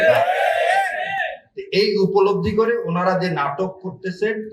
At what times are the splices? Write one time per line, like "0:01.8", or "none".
none